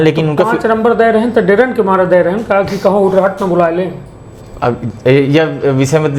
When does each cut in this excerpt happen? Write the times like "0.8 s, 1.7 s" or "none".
none